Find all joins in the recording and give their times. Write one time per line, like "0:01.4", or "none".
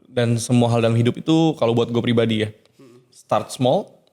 none